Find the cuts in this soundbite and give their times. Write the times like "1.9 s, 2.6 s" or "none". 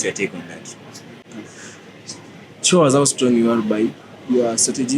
1.3 s